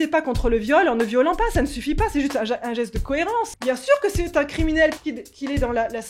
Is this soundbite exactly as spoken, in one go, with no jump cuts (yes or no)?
no